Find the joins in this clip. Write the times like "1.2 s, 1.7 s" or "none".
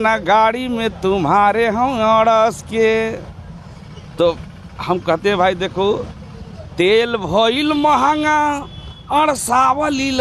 none